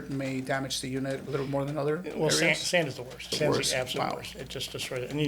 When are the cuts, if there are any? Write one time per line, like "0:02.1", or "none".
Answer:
0:01.2
0:03.3